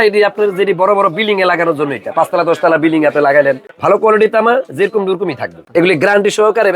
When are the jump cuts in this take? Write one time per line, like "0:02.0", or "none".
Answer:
0:03.7
0:05.5

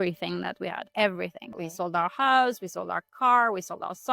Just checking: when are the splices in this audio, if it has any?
0:01.5

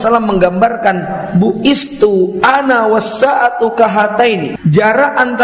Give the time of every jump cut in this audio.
0:04.5

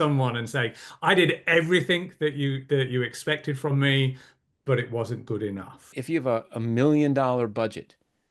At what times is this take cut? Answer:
0:06.0

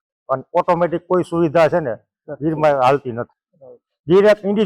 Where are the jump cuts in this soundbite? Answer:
none

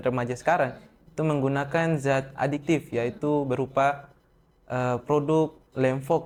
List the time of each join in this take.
none

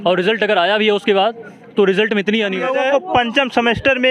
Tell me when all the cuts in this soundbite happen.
0:02.6

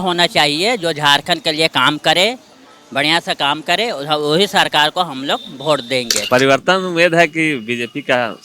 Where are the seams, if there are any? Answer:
0:06.1

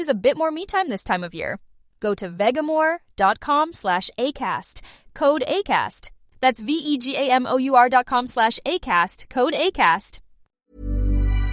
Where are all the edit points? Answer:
0:10.6

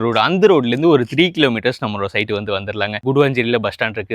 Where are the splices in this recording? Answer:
0:03.0

